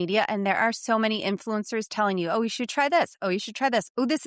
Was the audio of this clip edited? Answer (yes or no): no